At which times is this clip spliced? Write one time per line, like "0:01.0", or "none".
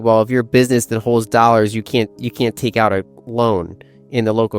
none

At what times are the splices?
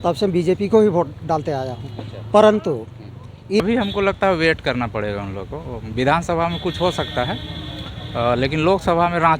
0:03.6

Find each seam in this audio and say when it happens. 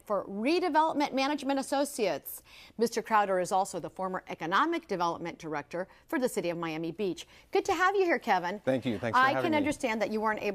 0:05.2

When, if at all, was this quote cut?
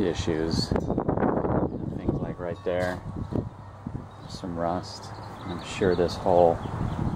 0:04.1

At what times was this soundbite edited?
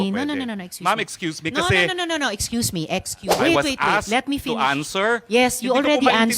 0:03.4

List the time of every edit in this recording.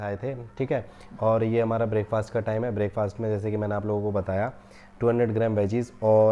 none

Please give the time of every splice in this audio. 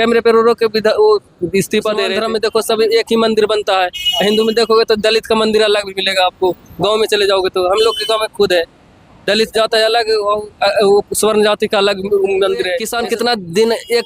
0:02.2
0:12.8

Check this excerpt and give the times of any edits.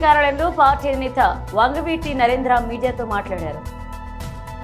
0:03.6

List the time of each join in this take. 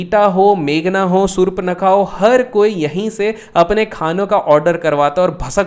none

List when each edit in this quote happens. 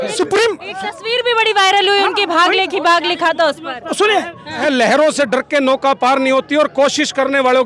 0:04.6

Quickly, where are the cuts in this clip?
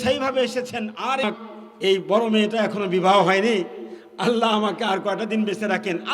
0:01.2

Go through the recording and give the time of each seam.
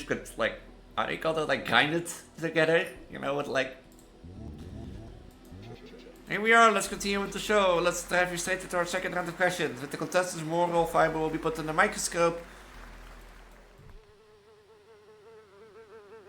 0:13.6

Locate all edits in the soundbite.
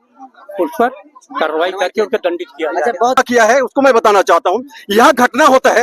0:03.2

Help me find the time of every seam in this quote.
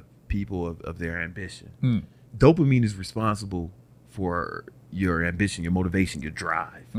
0:02.2

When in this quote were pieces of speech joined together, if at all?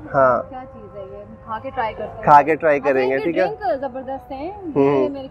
none

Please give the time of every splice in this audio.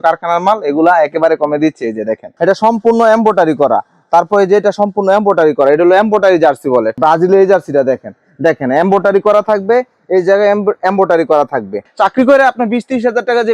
0:02.2
0:07.0
0:11.8

